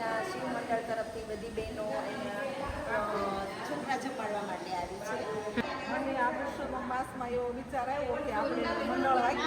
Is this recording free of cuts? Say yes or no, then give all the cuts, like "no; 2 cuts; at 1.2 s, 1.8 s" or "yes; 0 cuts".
no; 1 cut; at 5.6 s